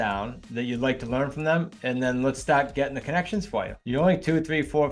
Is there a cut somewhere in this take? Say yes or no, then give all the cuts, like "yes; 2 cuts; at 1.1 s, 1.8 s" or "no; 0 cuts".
yes; 2 cuts; at 1.7 s, 3.8 s